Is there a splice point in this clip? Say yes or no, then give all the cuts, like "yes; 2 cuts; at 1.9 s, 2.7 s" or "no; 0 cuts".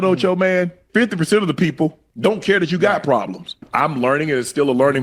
yes; 3 cuts; at 0.8 s, 2.0 s, 3.6 s